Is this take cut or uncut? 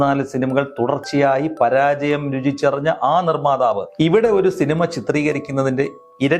cut